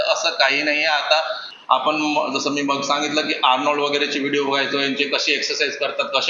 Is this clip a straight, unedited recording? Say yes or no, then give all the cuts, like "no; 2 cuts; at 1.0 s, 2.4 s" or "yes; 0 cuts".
no; 1 cut; at 1.5 s